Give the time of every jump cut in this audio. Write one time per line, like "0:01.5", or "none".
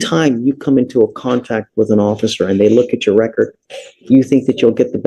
none